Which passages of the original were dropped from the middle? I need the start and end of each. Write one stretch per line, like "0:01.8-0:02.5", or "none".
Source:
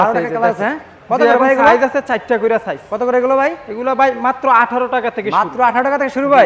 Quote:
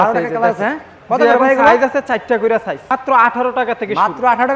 0:02.8-0:04.2